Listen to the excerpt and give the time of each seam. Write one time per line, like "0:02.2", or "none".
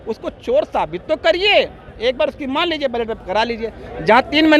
none

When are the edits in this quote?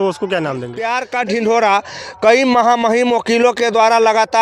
0:01.0

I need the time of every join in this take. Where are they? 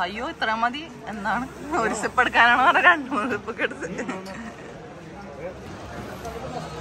0:05.7

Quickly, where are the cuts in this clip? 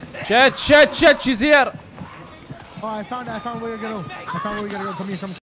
none

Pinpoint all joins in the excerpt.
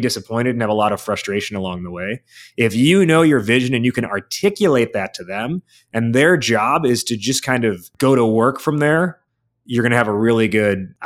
0:07.9
0:09.2

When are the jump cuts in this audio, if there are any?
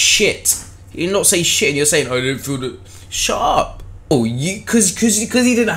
0:04.1

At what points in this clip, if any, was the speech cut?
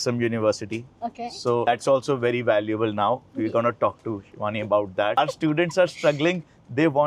0:01.7
0:05.2

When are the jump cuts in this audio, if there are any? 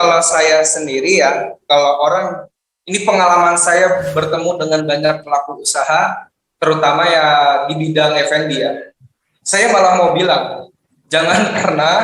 none

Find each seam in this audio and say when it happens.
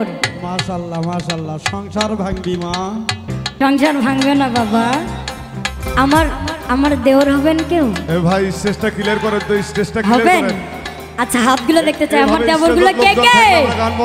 0:05.8

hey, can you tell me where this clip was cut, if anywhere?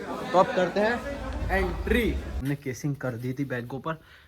0:02.4

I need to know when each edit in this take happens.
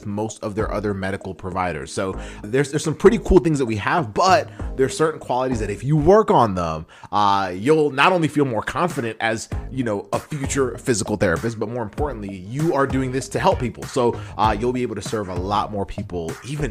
0:02.4

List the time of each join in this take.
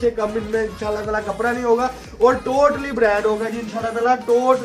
none

